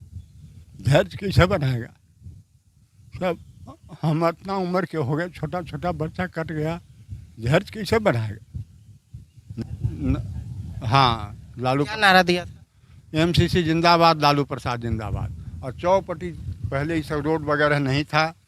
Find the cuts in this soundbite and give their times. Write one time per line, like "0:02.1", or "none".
0:09.6